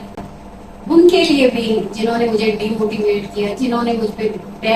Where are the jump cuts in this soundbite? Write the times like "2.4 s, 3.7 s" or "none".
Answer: none